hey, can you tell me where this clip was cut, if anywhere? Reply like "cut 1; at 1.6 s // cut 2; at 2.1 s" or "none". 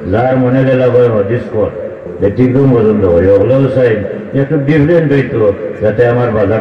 cut 1; at 2.1 s